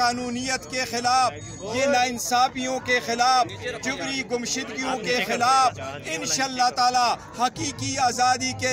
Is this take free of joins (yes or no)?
yes